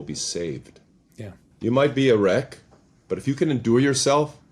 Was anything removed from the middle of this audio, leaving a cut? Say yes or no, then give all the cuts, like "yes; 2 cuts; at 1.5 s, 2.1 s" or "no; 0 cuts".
yes; 1 cut; at 1.4 s